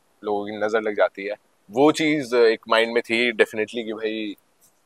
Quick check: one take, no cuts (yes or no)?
no